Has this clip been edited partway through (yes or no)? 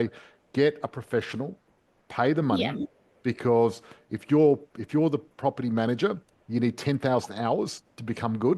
no